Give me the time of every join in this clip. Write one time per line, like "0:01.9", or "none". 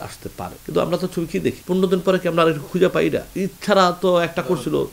0:01.6
0:03.3